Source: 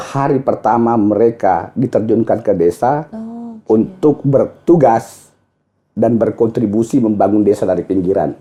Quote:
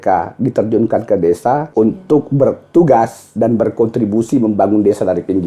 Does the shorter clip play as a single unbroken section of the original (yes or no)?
no